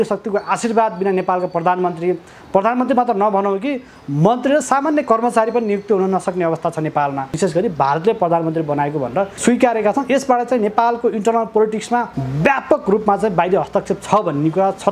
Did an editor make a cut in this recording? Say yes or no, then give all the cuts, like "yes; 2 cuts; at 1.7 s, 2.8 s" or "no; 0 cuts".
yes; 3 cuts; at 7.3 s, 9.3 s, 12.2 s